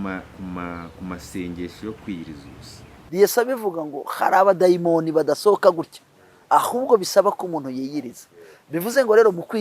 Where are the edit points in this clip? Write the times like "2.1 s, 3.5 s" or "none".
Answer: 3.0 s